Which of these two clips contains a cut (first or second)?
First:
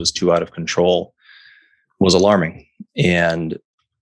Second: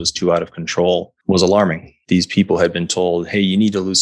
second